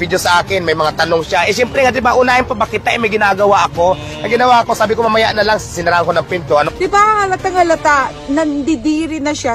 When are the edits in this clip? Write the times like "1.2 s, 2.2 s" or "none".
6.7 s

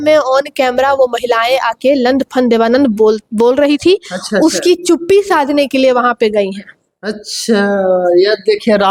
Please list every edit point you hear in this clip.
none

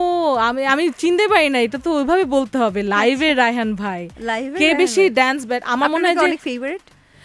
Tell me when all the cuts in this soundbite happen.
none

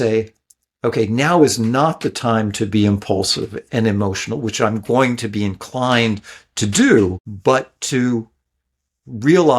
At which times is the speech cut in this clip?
7.3 s

